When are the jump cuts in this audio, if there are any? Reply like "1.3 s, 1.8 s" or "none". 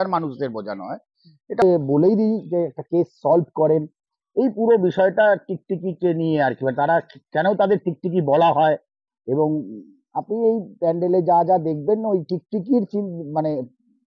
1.6 s